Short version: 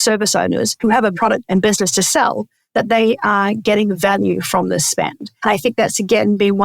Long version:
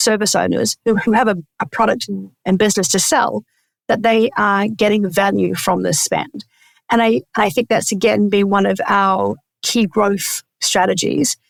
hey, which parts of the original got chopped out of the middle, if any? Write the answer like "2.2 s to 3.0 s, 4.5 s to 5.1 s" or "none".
0.9 s to 1.8 s, 3.5 s to 3.7 s, 6.5 s to 7.3 s